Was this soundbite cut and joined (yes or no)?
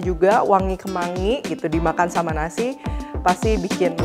no